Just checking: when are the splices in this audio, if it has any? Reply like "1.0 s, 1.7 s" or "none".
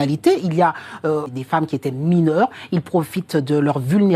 1.3 s